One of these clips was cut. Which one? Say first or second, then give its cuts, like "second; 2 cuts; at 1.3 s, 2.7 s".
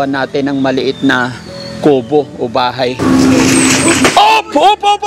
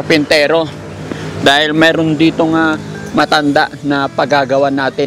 first; 1 cut; at 3.0 s